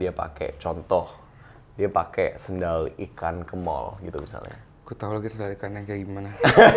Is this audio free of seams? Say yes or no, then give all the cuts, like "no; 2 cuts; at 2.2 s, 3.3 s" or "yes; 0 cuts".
yes; 0 cuts